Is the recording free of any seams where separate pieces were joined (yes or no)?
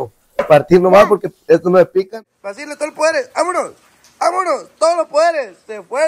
no